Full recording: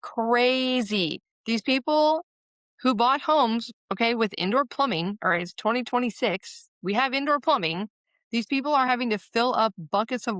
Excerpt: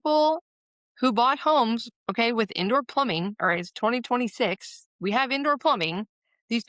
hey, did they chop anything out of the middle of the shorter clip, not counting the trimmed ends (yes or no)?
no